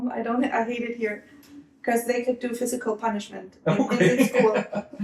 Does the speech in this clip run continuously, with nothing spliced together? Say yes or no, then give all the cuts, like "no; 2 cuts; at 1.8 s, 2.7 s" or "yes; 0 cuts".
yes; 0 cuts